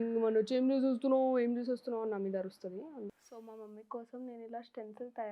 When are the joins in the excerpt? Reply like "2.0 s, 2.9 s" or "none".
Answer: 3.2 s